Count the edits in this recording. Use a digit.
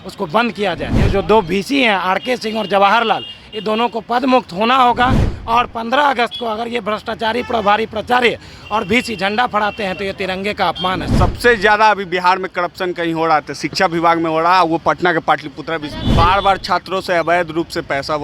3